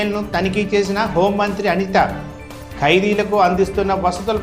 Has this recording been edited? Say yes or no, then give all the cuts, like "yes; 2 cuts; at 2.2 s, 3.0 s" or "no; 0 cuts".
no; 0 cuts